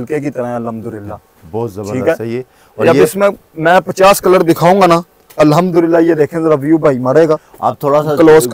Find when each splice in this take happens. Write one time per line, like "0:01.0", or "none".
none